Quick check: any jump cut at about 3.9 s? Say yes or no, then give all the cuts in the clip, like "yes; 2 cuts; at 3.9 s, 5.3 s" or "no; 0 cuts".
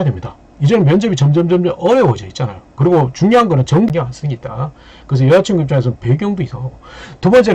yes; 1 cut; at 3.9 s